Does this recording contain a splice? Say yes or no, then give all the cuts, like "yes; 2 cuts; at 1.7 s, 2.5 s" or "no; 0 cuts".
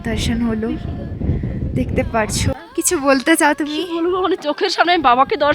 yes; 1 cut; at 2.5 s